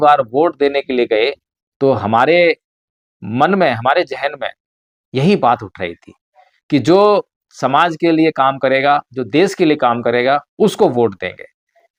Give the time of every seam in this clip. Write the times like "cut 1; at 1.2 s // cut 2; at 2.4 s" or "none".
none